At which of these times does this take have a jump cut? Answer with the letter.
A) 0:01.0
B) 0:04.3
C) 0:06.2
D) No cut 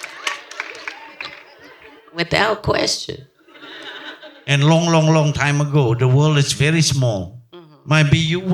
D